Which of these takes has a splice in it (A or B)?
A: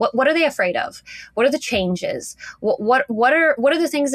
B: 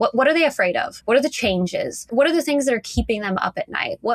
B